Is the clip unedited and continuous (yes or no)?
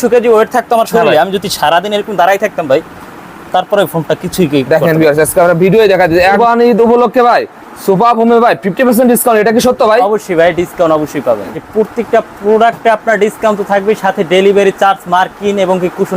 no